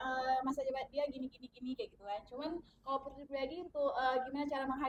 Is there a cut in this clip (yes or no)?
no